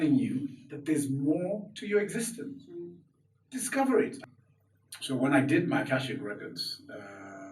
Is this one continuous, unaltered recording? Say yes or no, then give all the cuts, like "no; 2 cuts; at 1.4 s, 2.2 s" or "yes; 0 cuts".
no; 1 cut; at 4.2 s